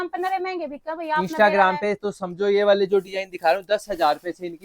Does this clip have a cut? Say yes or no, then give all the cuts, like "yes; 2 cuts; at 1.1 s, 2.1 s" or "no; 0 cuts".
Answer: no; 0 cuts